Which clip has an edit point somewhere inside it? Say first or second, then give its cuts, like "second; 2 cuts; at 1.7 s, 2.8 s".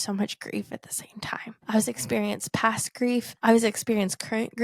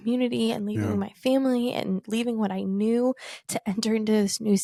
first; 2 cuts; at 1.6 s, 3.3 s